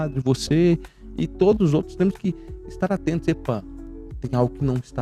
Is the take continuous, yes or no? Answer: yes